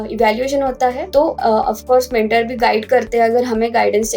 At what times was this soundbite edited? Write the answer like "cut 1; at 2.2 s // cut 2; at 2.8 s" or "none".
cut 1; at 1.2 s